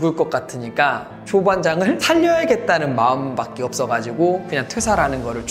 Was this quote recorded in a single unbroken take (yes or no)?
yes